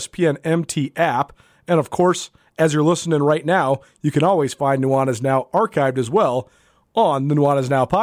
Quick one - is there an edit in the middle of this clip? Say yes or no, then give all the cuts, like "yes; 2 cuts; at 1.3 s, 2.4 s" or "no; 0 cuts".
no; 0 cuts